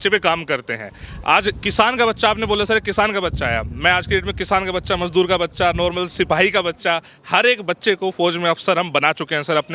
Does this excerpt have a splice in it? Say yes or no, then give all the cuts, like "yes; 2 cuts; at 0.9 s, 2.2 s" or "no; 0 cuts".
no; 0 cuts